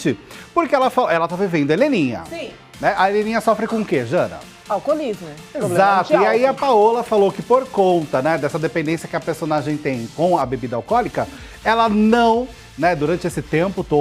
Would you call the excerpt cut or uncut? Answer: uncut